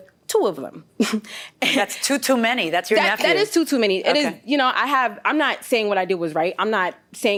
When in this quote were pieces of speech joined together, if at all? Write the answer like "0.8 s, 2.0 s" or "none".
none